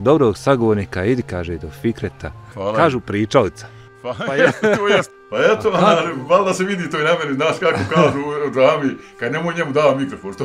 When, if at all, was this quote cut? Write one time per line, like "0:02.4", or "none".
0:02.5
0:05.1